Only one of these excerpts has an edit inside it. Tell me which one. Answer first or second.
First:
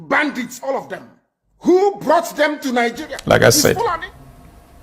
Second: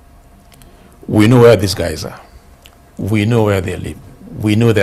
first